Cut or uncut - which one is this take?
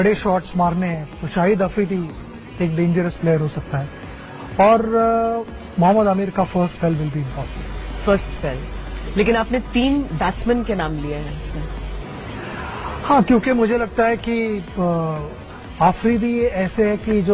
uncut